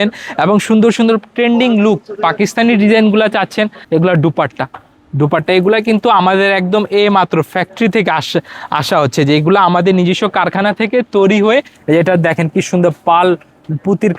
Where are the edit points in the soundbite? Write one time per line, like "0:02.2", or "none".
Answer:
0:03.8
0:11.7